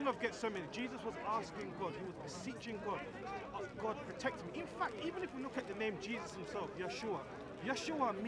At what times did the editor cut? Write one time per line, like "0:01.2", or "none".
none